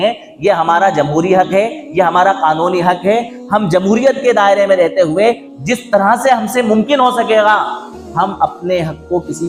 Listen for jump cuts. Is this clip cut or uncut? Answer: uncut